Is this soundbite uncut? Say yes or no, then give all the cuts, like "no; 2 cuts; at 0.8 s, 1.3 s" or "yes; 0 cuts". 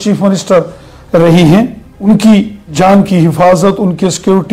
no; 2 cuts; at 1.9 s, 2.6 s